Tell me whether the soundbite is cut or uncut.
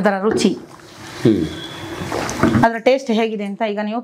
uncut